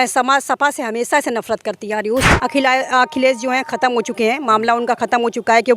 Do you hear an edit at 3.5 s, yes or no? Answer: no